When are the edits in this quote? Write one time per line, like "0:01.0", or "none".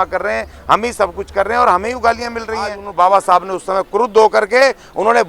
0:02.8